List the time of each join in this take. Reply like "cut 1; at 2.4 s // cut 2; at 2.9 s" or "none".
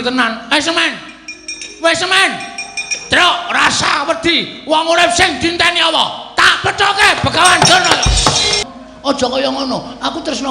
cut 1; at 8.6 s